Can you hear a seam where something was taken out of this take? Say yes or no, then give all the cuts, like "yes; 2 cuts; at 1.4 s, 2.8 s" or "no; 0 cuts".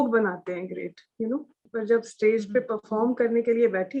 yes; 1 cut; at 1.6 s